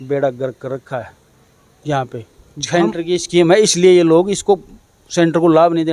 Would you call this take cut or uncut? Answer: uncut